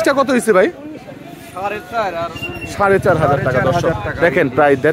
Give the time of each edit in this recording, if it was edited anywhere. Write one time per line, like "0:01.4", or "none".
none